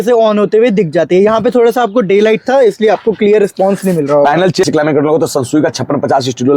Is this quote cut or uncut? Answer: cut